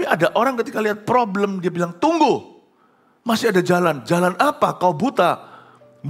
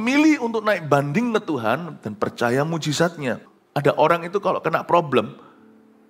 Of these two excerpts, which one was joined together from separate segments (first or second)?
second